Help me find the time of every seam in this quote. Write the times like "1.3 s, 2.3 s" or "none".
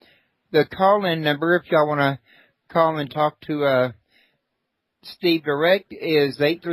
none